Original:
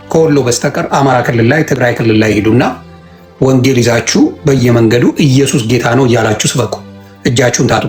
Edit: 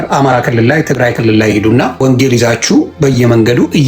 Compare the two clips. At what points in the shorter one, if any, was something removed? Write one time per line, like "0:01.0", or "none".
0:02.0